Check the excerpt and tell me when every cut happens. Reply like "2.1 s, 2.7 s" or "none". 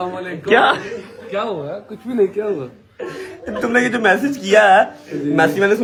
none